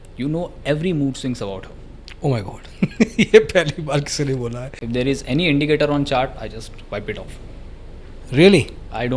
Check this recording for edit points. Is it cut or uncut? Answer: cut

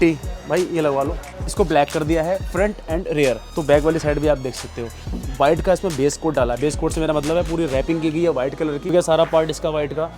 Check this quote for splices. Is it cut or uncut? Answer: cut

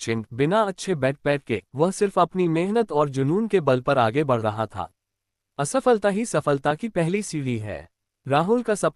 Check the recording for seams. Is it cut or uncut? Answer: cut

